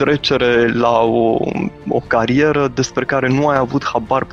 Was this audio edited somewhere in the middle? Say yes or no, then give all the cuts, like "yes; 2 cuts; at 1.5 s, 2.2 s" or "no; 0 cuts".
no; 0 cuts